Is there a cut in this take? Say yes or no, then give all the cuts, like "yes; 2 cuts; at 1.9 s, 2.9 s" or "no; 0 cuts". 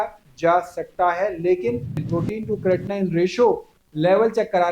yes; 1 cut; at 2.0 s